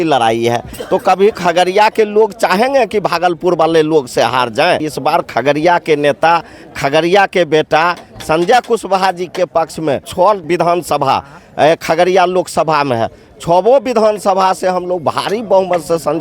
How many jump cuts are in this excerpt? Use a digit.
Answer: 2